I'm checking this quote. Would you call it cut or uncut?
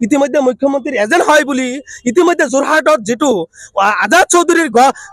uncut